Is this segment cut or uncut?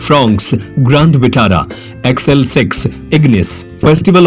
uncut